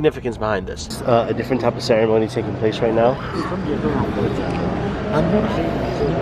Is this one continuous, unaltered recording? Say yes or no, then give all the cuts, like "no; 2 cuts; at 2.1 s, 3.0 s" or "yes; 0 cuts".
no; 1 cut; at 0.9 s